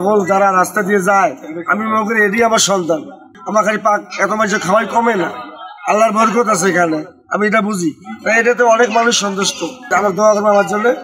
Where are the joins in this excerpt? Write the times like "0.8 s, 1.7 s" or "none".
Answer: 3.3 s, 9.8 s